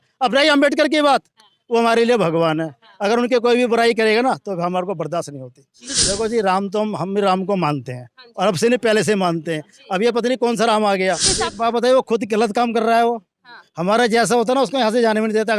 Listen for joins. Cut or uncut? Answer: cut